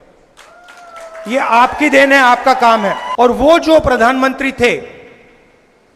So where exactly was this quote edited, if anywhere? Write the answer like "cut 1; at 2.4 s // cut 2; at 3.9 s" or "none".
cut 1; at 3.0 s